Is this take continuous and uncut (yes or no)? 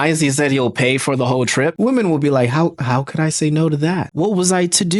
no